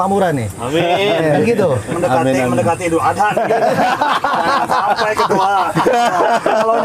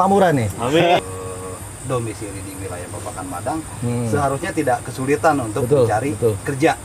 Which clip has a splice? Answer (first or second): second